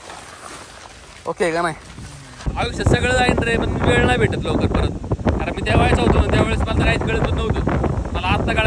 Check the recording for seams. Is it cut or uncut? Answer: cut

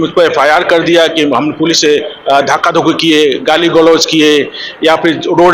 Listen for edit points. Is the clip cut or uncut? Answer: uncut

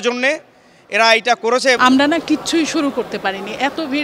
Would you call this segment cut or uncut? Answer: cut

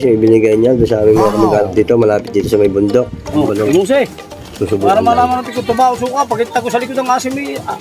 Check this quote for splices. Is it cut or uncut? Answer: cut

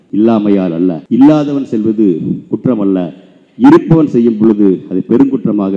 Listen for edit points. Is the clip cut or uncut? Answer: cut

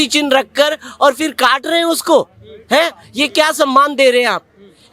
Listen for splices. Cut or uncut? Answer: uncut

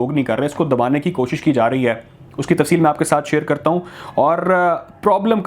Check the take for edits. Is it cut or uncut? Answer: uncut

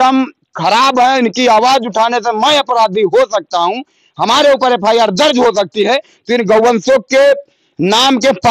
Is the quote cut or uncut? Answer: uncut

